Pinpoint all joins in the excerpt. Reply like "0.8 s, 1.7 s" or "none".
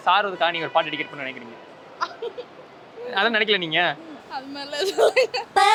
none